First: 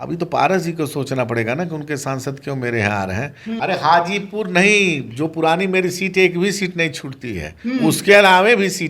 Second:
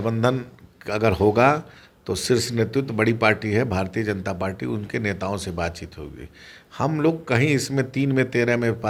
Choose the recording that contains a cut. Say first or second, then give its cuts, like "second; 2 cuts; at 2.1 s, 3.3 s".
first; 1 cut; at 3.5 s